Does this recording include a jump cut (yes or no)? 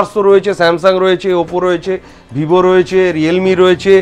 no